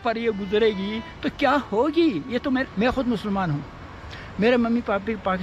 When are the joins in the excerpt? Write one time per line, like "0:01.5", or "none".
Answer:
0:02.6

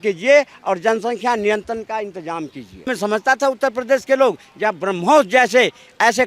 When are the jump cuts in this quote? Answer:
0:02.9

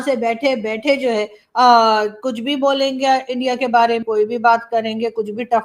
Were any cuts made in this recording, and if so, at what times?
0:04.0

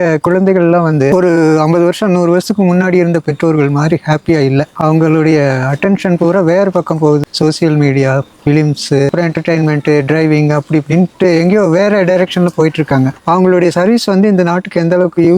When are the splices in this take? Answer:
0:07.2

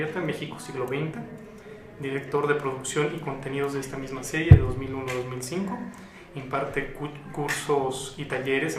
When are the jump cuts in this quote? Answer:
0:06.8

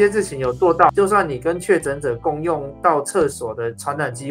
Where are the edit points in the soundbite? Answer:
0:00.9

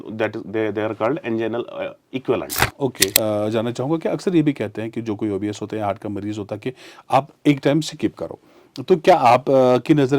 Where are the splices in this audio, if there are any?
0:03.2

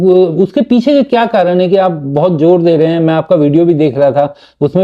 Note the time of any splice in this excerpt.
none

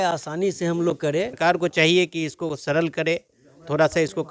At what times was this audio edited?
0:01.4

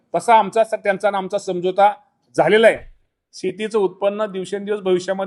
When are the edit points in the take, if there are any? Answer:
0:02.9

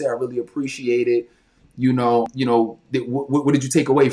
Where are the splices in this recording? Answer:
0:02.3

